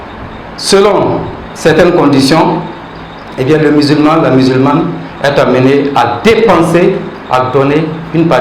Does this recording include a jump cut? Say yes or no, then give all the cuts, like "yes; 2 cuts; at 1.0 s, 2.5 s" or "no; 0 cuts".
no; 0 cuts